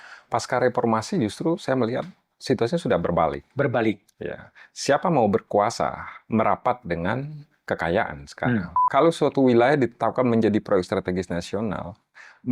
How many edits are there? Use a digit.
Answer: 1